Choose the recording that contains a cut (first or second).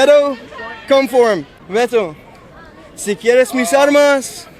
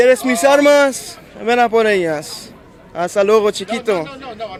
first